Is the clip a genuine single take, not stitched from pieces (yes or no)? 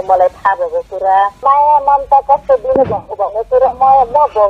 no